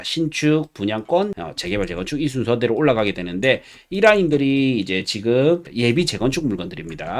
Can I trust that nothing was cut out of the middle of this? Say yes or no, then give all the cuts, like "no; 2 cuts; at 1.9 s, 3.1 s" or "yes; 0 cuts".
no; 2 cuts; at 1.5 s, 5.7 s